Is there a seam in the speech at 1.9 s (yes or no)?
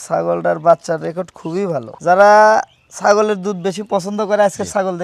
yes